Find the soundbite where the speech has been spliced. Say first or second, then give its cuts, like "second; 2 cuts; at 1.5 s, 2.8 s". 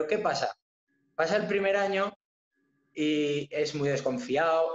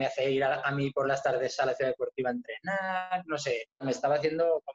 second; 1 cut; at 3.8 s